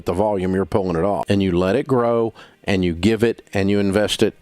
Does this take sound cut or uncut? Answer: cut